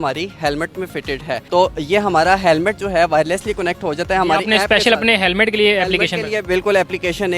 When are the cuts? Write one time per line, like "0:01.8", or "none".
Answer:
none

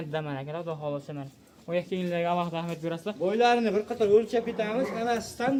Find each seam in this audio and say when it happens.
none

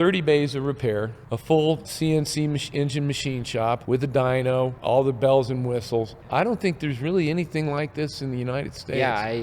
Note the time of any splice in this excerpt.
0:01.2
0:01.9
0:03.8
0:04.8
0:06.2

